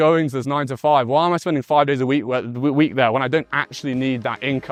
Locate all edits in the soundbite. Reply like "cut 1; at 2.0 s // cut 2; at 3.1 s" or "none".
none

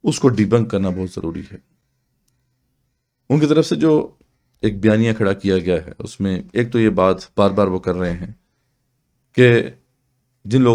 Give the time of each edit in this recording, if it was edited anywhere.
none

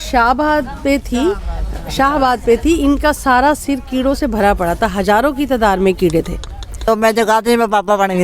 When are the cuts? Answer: cut 1; at 6.8 s

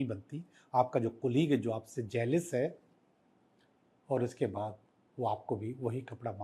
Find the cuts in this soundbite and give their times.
none

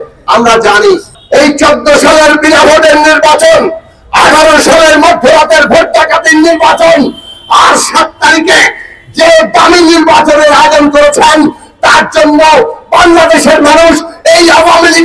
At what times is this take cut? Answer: cut 1; at 1.1 s

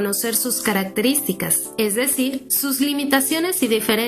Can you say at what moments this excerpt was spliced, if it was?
cut 1; at 1.6 s // cut 2; at 2.5 s

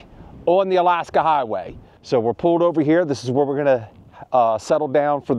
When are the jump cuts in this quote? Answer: none

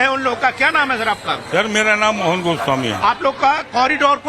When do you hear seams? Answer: cut 1; at 1.0 s

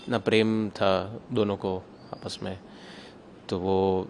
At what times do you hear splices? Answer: none

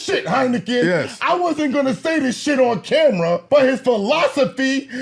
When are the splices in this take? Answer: cut 1; at 3.4 s

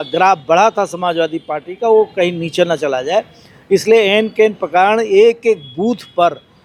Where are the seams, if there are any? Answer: none

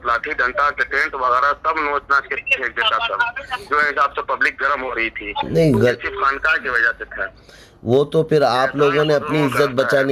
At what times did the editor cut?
none

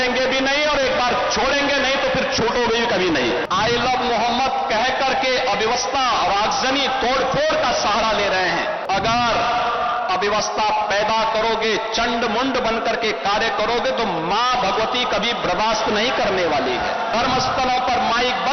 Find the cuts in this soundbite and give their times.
cut 1; at 3.4 s // cut 2; at 8.8 s // cut 3; at 17.1 s

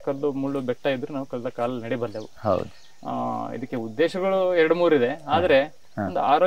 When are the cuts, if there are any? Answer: none

